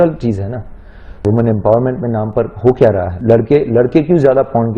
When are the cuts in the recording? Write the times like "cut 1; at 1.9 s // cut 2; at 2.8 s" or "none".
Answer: cut 1; at 1.2 s // cut 2; at 3.1 s